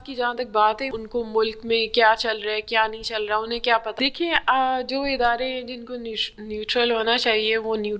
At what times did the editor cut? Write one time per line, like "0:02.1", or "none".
0:00.9
0:04.0

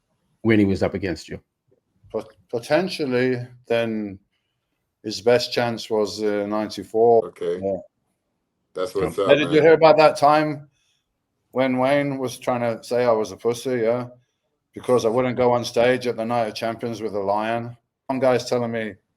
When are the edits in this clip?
0:07.2
0:18.1

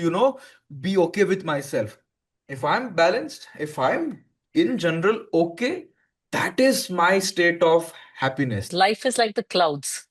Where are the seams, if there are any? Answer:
0:08.7

